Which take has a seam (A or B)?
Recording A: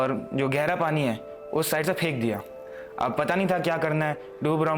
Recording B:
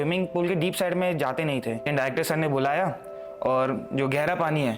B